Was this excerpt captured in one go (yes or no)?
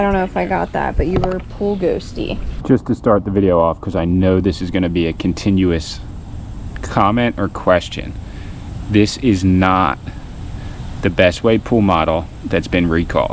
no